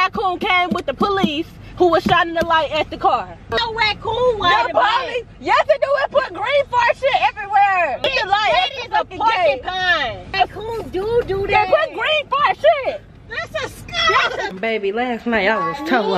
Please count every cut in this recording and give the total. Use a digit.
4